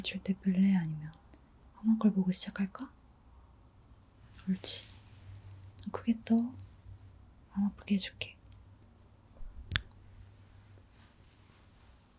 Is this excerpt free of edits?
yes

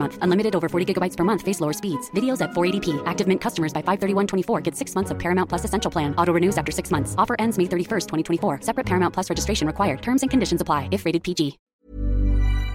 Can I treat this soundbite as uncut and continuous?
no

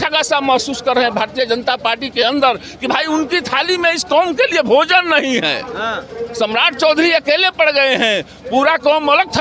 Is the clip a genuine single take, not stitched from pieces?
yes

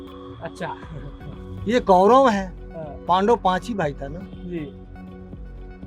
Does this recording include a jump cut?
no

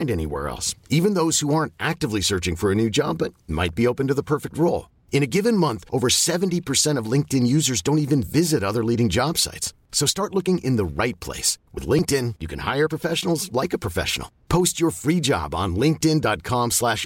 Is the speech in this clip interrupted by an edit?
no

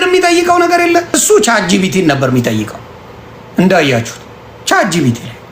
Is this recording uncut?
no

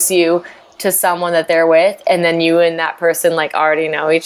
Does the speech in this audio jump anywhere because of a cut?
no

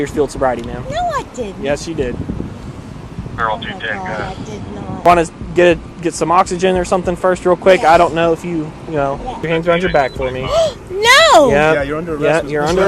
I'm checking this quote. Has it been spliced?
yes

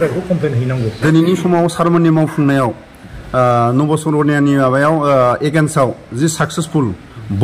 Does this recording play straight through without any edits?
no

